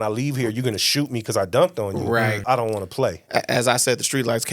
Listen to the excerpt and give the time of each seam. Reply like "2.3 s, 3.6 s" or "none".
2.4 s